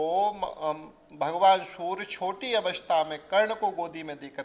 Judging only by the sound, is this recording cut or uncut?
uncut